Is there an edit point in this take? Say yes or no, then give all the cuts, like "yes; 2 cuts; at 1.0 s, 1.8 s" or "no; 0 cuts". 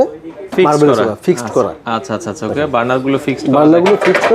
no; 0 cuts